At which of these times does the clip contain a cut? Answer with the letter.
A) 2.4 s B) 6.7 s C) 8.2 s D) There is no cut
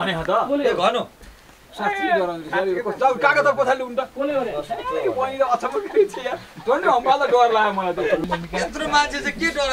C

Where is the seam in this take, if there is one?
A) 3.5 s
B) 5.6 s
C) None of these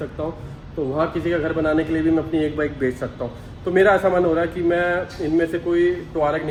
C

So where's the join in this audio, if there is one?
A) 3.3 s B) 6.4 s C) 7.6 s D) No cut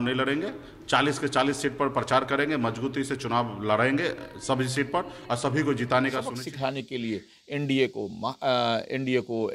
B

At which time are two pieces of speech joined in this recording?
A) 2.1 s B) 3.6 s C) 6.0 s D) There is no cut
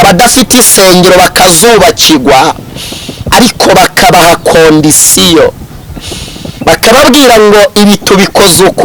D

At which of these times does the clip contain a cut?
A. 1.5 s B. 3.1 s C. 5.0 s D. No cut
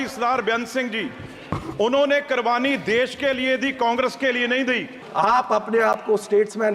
C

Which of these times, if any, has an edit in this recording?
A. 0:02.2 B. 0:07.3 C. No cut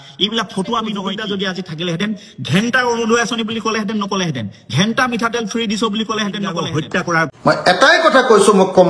B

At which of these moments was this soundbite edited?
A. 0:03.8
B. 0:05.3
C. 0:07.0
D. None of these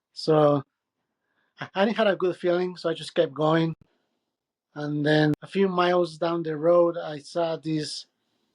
B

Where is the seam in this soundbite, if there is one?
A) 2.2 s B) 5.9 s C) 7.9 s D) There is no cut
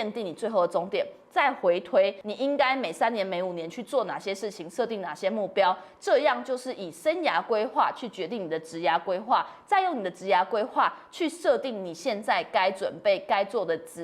A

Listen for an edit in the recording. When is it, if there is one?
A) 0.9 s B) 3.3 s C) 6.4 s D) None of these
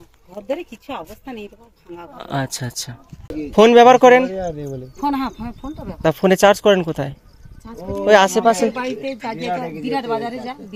B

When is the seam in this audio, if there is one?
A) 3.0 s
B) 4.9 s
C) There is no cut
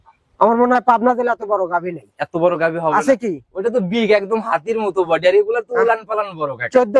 C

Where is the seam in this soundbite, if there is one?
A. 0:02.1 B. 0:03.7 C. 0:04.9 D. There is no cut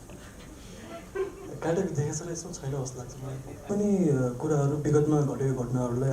B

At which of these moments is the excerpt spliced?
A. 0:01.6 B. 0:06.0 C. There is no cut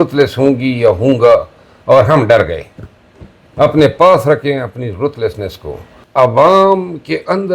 B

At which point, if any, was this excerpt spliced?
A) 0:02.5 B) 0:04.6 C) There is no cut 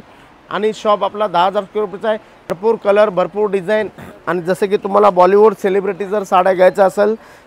A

